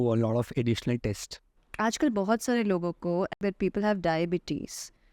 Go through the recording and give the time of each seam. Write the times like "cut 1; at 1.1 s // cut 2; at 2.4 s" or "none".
cut 1; at 1.6 s // cut 2; at 3.3 s